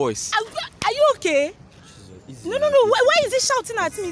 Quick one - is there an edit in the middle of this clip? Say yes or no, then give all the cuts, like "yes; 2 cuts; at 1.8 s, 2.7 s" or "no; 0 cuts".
no; 0 cuts